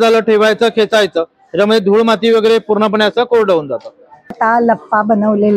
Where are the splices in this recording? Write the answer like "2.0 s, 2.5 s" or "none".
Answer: 4.3 s